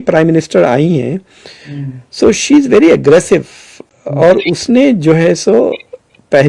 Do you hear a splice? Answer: no; 0 cuts

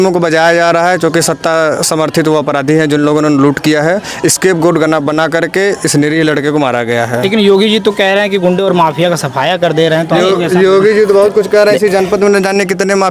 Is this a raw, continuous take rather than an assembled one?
yes; 0 cuts

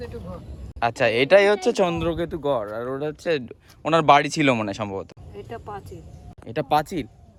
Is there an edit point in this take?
no; 0 cuts

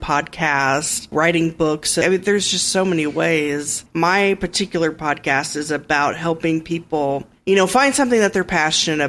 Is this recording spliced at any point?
yes; 4 cuts; at 1.1 s, 2.0 s, 3.8 s, 7.3 s

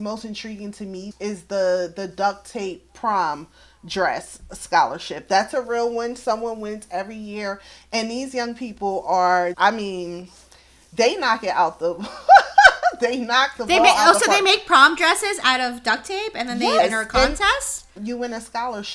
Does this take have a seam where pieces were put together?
yes; 3 cuts; at 1.1 s, 9.5 s, 17.9 s

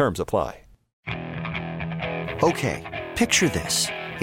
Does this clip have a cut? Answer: yes; 1 cut; at 1.0 s

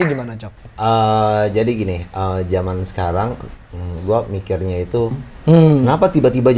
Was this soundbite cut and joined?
yes; 1 cut; at 5.3 s

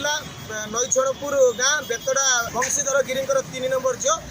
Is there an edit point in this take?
yes; 1 cut; at 2.4 s

